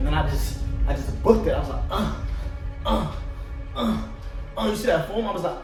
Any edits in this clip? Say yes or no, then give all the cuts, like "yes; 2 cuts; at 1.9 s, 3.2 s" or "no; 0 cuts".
no; 0 cuts